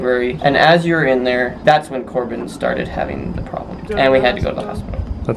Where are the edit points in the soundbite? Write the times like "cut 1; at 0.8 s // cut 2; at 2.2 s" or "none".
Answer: cut 1; at 1.5 s // cut 2; at 3.8 s